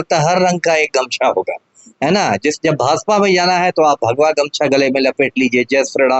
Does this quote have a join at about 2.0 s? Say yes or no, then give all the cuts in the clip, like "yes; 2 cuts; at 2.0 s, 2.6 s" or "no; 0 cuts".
no; 0 cuts